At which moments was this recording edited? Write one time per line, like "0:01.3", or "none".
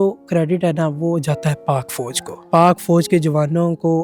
0:02.4